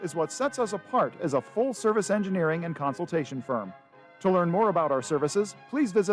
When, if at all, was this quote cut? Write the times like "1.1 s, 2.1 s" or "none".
none